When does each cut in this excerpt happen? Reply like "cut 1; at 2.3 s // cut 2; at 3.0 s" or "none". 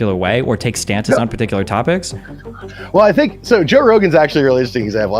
none